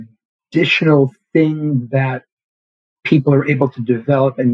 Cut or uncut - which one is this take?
uncut